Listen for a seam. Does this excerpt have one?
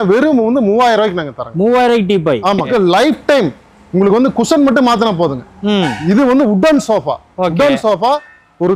yes; 1 cut; at 2.7 s

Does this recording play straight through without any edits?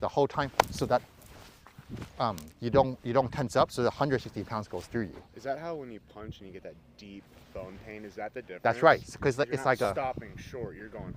yes; 0 cuts

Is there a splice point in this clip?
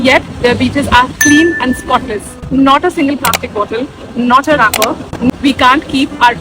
yes; 1 cut; at 5.3 s

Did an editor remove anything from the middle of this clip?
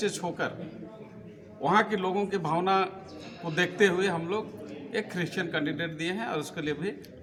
no; 0 cuts

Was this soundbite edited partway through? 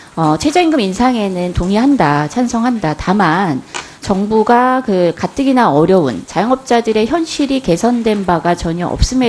no; 0 cuts

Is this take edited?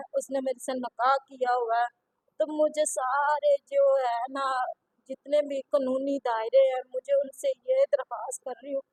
no; 0 cuts

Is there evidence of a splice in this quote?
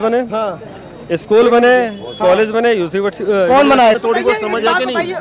yes; 1 cut; at 3.9 s

